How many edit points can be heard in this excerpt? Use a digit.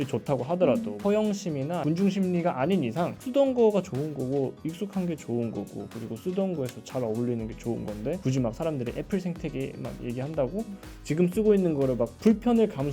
1